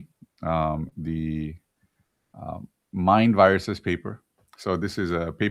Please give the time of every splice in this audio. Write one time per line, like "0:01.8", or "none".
none